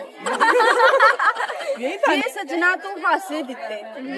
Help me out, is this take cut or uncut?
cut